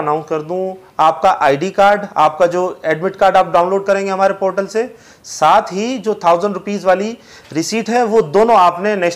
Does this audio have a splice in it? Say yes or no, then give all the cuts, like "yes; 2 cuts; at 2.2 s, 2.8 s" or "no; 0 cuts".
no; 0 cuts